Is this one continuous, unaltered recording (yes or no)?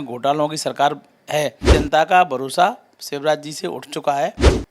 no